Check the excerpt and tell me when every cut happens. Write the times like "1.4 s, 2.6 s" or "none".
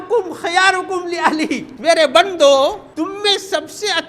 1.7 s, 2.8 s